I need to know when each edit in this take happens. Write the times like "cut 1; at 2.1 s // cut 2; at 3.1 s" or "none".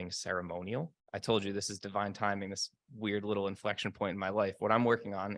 cut 1; at 1.0 s

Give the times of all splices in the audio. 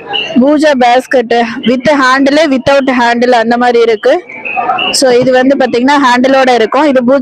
none

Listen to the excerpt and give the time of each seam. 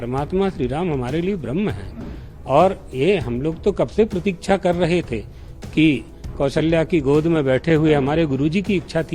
none

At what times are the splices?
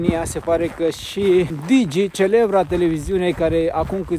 cut 1; at 1.6 s

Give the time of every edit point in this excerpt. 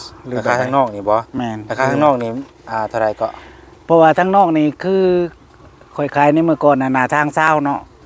none

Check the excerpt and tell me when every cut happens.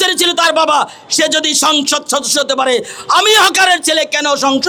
none

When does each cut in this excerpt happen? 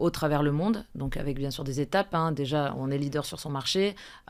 none

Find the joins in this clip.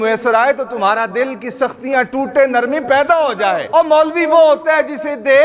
cut 1; at 3.6 s

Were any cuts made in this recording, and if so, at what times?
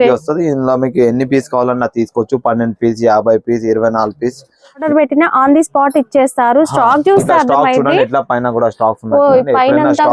cut 1; at 4.8 s

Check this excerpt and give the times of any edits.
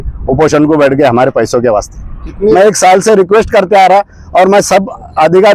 cut 1; at 2.5 s

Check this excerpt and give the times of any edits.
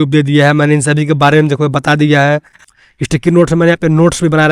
cut 1; at 2.6 s

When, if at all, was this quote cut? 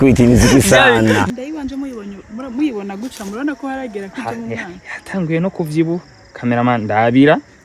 cut 1; at 1.3 s

